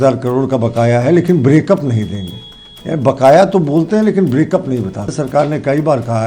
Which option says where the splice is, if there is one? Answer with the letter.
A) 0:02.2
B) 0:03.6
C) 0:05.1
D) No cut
C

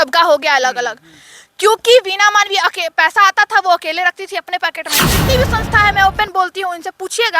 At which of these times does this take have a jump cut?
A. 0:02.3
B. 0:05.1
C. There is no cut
B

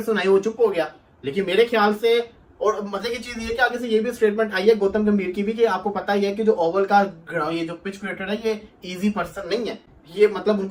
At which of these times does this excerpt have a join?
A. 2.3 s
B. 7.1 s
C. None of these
C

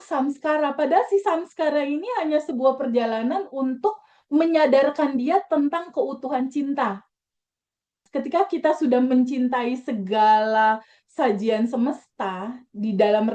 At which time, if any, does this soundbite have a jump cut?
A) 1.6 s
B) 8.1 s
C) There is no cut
B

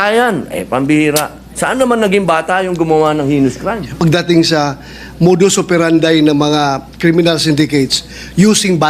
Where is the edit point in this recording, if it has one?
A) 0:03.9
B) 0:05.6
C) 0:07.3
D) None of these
A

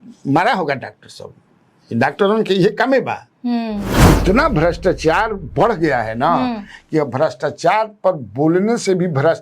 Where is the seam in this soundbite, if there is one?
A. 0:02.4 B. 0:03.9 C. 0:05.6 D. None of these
B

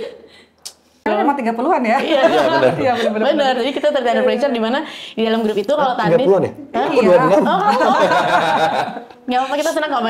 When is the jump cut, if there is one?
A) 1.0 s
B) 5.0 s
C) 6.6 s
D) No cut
A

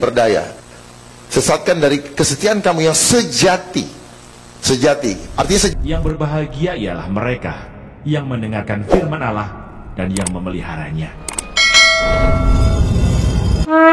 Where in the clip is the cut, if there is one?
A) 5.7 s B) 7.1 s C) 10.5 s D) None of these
A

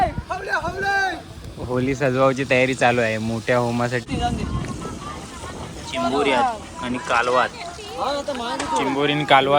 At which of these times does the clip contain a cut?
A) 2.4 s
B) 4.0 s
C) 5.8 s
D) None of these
B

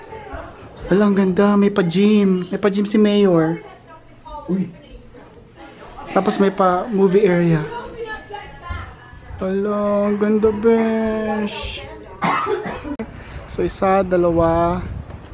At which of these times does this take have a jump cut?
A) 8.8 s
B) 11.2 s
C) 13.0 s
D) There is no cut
C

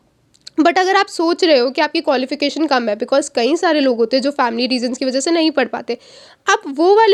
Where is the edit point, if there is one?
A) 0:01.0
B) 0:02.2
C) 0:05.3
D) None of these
D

